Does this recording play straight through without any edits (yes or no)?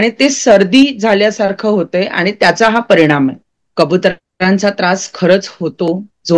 no